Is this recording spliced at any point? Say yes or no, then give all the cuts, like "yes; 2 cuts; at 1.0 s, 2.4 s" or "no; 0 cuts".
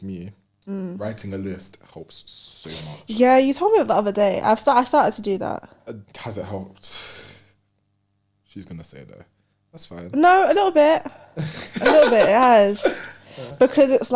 no; 0 cuts